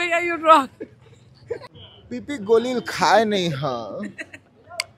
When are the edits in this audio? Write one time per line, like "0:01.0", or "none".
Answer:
0:01.5